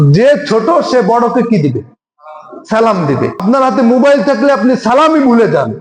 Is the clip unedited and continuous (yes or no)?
no